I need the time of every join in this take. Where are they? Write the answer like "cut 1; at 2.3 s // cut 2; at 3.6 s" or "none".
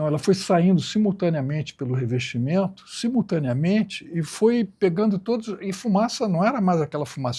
none